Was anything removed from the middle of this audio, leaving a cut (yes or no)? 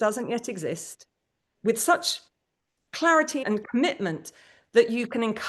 yes